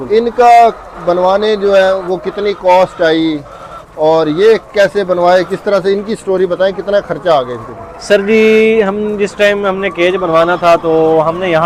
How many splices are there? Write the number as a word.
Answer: zero